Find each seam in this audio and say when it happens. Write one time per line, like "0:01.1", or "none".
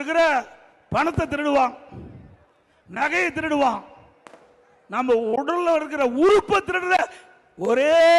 none